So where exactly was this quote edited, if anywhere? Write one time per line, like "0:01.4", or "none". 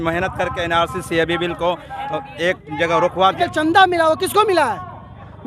0:03.4